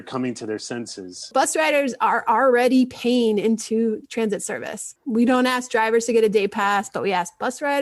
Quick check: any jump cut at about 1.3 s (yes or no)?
yes